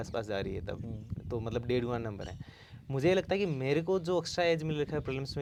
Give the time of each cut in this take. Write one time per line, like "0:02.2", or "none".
none